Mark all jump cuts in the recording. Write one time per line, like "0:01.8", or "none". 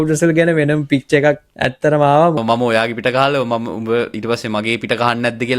0:01.5
0:02.4